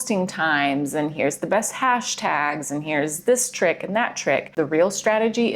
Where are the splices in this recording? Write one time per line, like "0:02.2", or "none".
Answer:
0:04.5